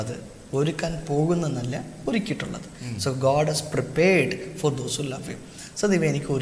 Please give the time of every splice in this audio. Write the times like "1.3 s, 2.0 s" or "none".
none